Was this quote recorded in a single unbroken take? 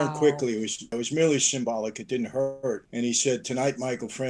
no; 2 cuts; at 0.9 s, 2.9 s

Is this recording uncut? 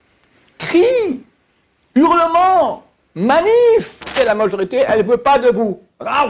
no; 1 cut; at 4.1 s

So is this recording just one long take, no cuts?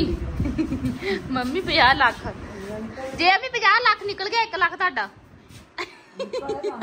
yes; 0 cuts

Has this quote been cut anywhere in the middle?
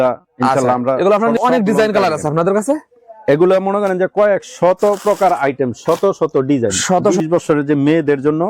yes; 2 cuts; at 1.4 s, 7.2 s

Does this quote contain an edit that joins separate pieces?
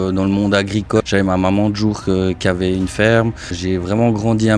yes; 2 cuts; at 1.0 s, 3.5 s

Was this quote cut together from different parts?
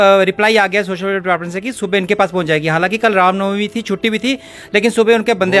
no; 0 cuts

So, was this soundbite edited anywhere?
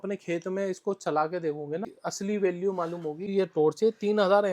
yes; 2 cuts; at 2.0 s, 3.3 s

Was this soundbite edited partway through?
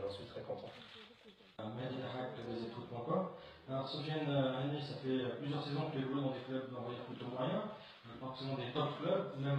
no; 0 cuts

